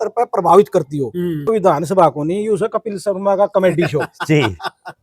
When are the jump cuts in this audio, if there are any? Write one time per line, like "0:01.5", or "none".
0:01.6

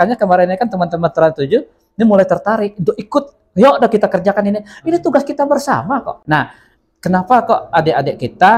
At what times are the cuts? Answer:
0:06.1

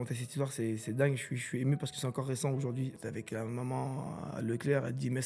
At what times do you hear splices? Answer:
0:03.0

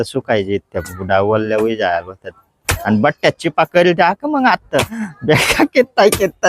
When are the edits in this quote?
0:02.8
0:05.1

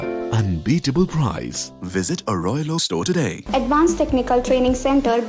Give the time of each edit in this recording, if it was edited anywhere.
0:03.4

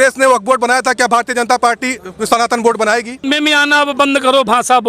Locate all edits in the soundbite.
0:03.3

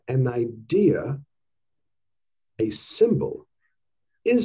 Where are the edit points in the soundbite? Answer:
none

